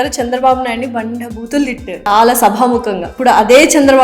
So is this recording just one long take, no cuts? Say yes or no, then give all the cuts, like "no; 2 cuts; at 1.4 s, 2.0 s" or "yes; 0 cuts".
no; 2 cuts; at 2.0 s, 3.1 s